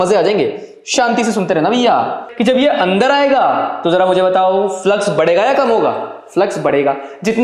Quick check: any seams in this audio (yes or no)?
yes